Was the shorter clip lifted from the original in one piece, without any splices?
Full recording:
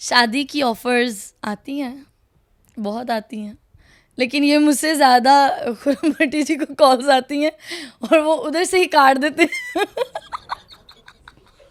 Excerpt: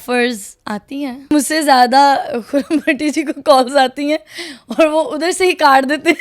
no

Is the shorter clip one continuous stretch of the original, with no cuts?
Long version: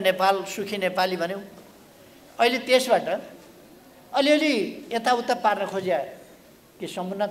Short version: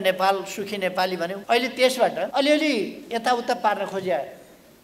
no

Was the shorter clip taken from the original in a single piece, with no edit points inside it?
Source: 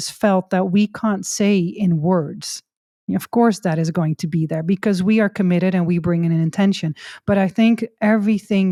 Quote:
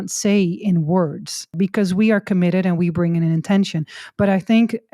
no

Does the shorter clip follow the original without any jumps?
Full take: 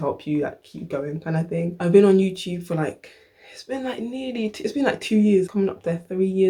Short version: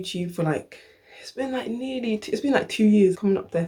yes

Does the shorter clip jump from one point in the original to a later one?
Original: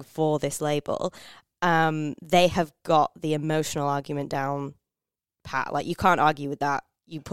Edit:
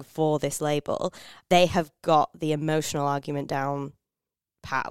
yes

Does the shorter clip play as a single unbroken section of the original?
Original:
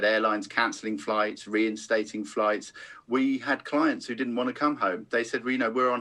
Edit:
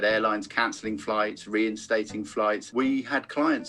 no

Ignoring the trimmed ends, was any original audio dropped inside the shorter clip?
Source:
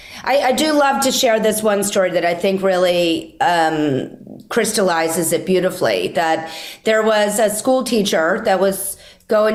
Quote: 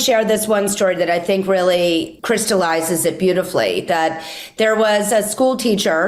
yes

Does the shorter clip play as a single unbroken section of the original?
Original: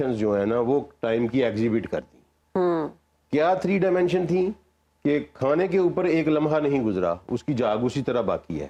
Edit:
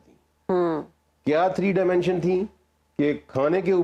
yes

